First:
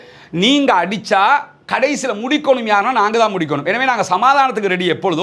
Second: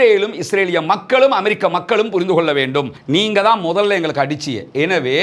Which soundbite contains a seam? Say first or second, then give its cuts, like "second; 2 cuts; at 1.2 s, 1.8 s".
second; 1 cut; at 3.0 s